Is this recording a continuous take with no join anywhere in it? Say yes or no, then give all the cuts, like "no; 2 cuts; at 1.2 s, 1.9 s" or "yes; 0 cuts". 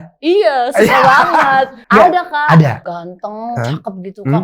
no; 2 cuts; at 1.8 s, 2.8 s